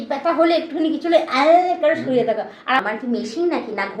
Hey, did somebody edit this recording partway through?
yes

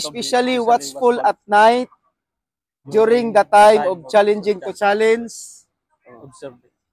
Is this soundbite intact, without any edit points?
yes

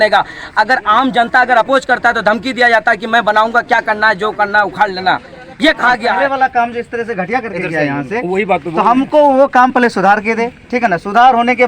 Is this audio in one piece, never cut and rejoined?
no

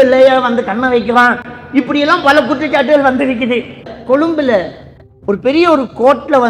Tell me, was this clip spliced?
yes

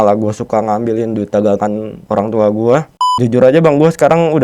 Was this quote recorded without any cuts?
no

